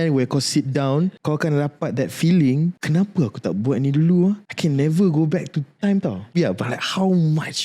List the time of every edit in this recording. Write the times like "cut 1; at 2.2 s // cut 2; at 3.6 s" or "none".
cut 1; at 1.2 s // cut 2; at 2.8 s // cut 3; at 4.5 s // cut 4; at 6.3 s